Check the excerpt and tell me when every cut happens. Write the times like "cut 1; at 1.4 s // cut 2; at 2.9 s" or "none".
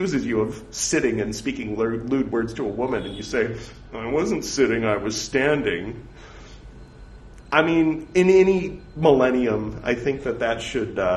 none